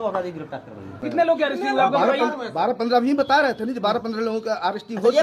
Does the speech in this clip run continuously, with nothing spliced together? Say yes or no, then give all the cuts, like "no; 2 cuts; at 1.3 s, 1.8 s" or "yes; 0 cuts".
no; 1 cut; at 1.0 s